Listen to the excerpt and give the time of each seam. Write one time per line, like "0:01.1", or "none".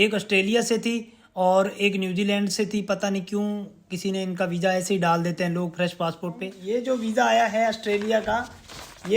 0:06.5

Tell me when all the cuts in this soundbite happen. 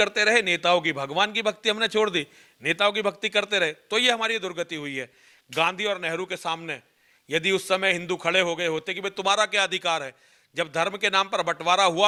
none

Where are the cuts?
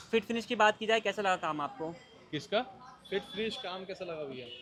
none

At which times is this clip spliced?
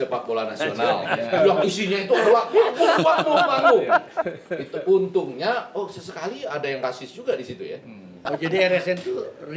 0:08.2

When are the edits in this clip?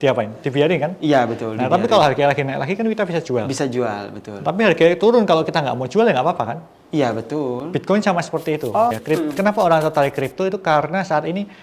0:09.0

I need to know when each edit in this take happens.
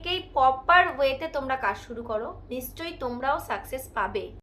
none

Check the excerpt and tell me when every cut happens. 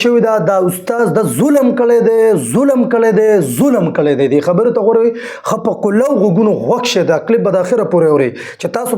none

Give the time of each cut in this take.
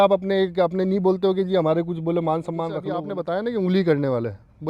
0:03.1

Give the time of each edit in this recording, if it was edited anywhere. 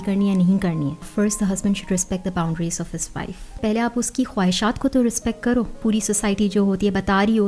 0:01.1
0:03.6
0:05.8

